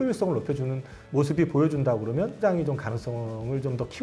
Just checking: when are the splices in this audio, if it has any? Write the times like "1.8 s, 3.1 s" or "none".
2.3 s